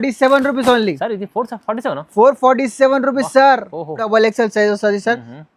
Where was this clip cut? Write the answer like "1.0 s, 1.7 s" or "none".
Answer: 4.1 s